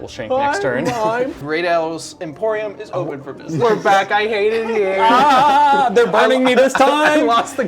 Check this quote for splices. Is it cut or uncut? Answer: cut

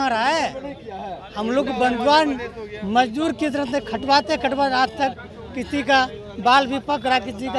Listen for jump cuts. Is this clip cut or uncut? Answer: uncut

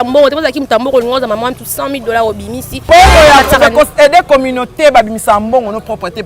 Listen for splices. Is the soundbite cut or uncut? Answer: cut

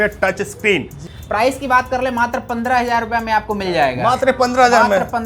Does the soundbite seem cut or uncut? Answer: cut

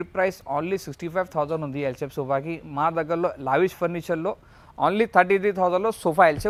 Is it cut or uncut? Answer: uncut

